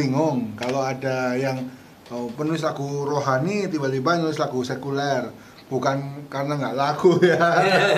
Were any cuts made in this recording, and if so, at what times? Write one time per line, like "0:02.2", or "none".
none

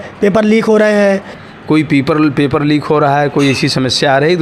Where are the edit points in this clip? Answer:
0:01.3

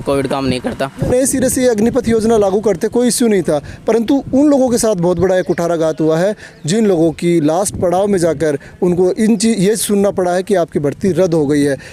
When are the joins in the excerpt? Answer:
0:01.1

